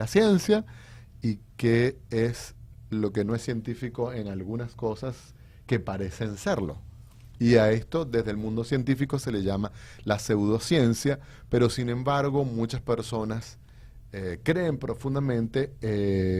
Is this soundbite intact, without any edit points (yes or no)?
yes